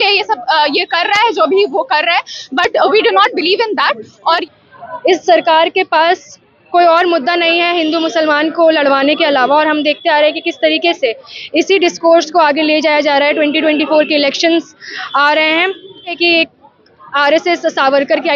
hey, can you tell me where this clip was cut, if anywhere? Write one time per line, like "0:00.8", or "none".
0:04.2
0:16.2